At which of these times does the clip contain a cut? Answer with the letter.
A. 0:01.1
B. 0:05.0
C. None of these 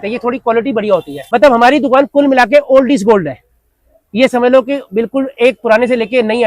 A